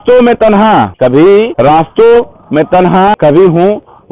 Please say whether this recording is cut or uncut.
cut